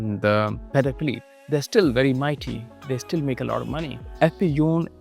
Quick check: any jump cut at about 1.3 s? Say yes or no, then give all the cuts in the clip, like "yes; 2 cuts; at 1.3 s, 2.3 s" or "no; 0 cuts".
yes; 2 cuts; at 1.3 s, 4.0 s